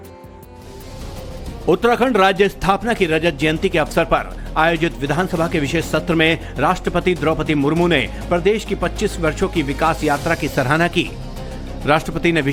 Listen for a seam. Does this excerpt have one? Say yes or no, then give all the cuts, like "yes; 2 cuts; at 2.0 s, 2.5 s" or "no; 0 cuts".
no; 0 cuts